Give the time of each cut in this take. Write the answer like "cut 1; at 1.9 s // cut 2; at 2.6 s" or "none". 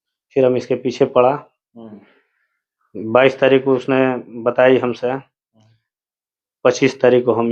none

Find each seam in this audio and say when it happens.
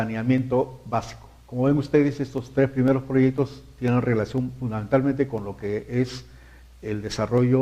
none

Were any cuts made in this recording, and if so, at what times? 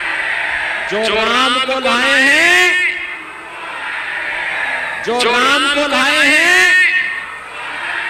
none

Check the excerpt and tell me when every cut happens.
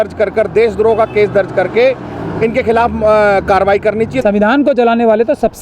cut 1; at 4.2 s

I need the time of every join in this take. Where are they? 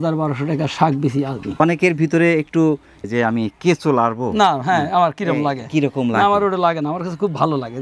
cut 1; at 1.6 s // cut 2; at 3.0 s

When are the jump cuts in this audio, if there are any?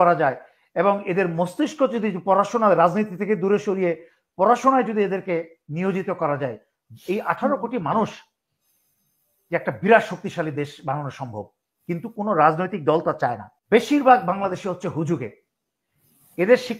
cut 1; at 13.5 s

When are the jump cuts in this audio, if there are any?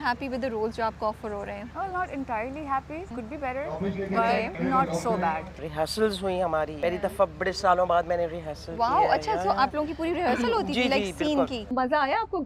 cut 1; at 1.7 s // cut 2; at 3.1 s // cut 3; at 4.6 s // cut 4; at 5.7 s // cut 5; at 6.7 s // cut 6; at 11.7 s

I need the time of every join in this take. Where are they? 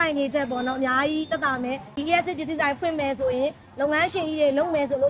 cut 1; at 2.0 s

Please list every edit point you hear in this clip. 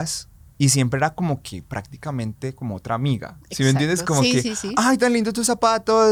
none

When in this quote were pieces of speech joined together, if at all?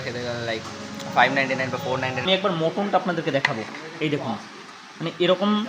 cut 1; at 2.3 s

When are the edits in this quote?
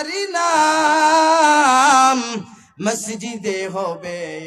none

